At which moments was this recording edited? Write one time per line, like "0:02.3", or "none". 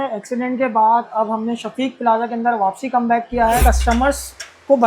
0:01.1
0:03.6